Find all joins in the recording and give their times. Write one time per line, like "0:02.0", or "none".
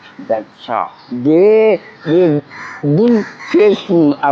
0:01.0
0:01.9
0:03.3